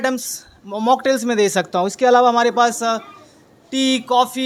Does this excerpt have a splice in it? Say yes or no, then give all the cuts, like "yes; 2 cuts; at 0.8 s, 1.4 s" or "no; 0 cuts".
no; 0 cuts